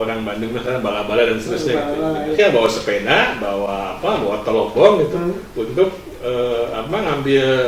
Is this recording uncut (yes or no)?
no